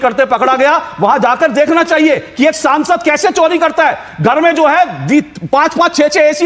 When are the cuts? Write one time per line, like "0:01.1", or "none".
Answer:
none